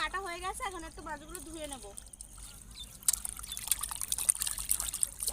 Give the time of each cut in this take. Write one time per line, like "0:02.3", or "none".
0:02.5